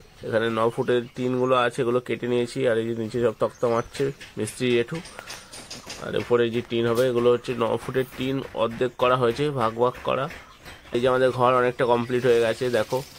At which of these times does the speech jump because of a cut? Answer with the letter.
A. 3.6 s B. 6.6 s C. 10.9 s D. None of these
C